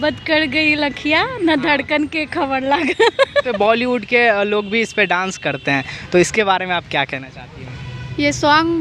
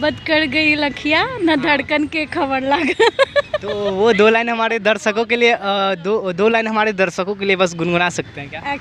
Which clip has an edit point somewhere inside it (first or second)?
first